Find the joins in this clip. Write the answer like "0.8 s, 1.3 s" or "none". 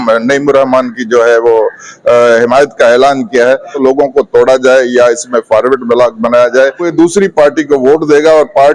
3.7 s, 6.9 s